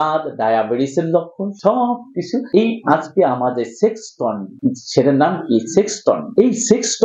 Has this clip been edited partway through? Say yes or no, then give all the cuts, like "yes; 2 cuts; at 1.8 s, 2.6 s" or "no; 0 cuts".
no; 0 cuts